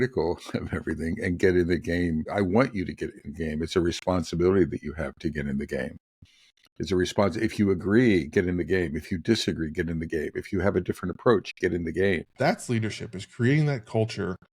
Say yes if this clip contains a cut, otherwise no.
yes